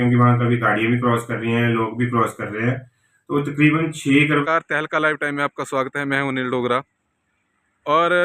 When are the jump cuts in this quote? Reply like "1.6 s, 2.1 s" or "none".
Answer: 4.4 s